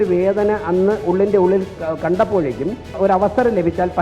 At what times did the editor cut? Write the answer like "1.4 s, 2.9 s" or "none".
1.7 s, 2.9 s